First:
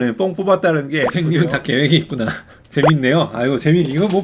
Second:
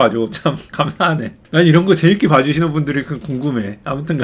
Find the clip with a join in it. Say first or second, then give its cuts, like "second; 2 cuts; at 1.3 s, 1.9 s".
first; 1 cut; at 1.1 s